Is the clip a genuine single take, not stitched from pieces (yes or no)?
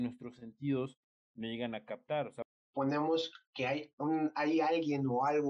no